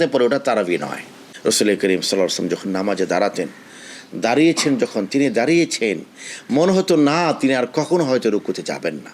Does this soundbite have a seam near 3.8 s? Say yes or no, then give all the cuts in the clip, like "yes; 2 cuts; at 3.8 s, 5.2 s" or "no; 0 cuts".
no; 1 cut; at 1.2 s